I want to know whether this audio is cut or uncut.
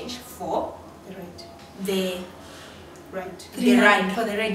uncut